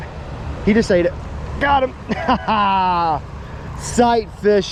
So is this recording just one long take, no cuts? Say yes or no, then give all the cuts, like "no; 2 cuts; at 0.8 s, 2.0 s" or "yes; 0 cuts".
yes; 0 cuts